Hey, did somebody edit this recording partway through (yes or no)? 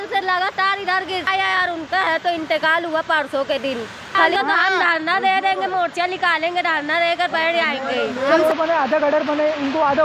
yes